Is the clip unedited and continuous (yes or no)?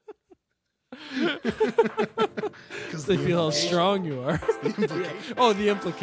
yes